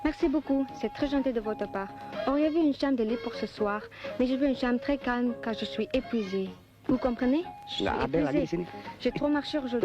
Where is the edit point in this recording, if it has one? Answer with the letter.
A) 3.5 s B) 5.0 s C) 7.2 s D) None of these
C